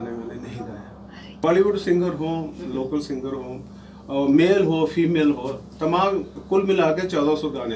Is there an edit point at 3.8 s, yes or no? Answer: no